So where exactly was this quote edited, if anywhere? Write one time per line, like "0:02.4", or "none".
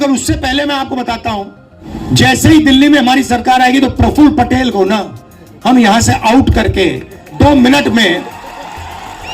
0:01.8